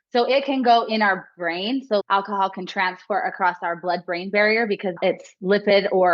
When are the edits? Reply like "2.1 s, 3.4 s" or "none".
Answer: 2.0 s, 5.0 s

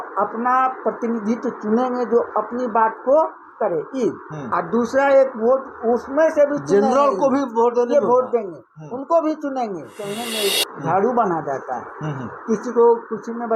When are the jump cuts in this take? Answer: 10.2 s

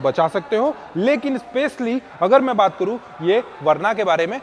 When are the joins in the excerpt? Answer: none

